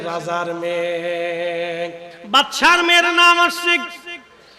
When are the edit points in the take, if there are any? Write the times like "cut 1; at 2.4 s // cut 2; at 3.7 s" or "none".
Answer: cut 1; at 2.1 s

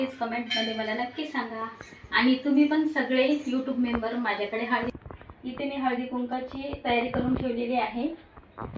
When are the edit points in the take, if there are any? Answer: cut 1; at 4.9 s

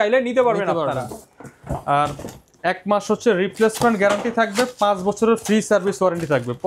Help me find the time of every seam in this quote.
none

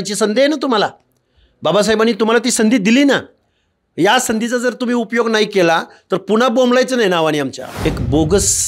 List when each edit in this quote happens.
cut 1; at 7.6 s

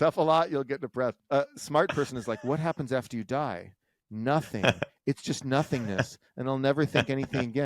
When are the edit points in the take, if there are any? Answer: cut 1; at 1.2 s

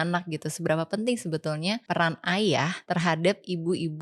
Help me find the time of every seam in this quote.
cut 1; at 1.8 s // cut 2; at 2.8 s

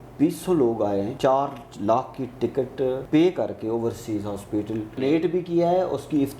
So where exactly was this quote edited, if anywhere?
cut 1; at 1.1 s // cut 2; at 3.0 s // cut 3; at 5.0 s

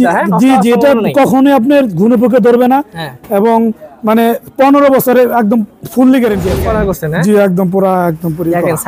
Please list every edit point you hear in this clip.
cut 1; at 6.5 s

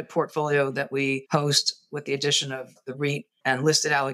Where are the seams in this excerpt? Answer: cut 1; at 1.2 s

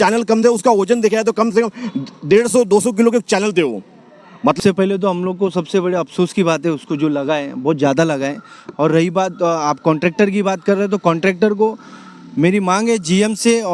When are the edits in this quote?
cut 1; at 4.6 s

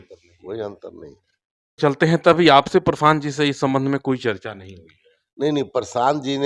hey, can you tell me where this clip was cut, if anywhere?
none

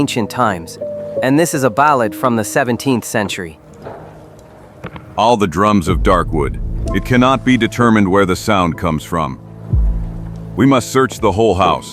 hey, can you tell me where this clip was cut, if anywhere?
cut 1; at 10.5 s

